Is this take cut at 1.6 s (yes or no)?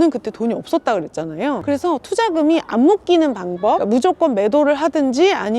yes